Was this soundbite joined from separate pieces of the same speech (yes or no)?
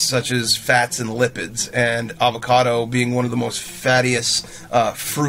no